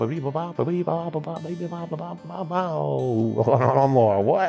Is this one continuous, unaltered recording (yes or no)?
yes